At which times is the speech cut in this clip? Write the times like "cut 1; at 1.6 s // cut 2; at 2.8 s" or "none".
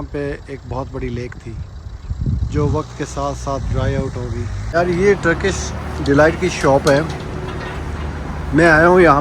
cut 1; at 4.7 s